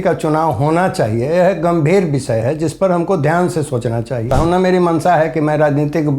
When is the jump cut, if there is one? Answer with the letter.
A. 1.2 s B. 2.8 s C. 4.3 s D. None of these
C